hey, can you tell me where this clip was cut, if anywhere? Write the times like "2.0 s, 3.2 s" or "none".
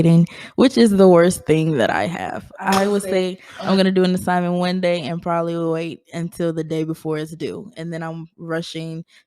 none